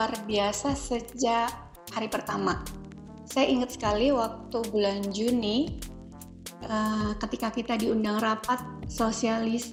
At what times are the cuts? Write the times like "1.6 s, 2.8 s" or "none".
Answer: none